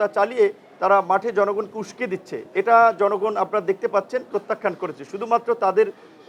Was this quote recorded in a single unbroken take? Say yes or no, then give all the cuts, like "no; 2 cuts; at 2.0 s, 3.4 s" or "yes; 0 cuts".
yes; 0 cuts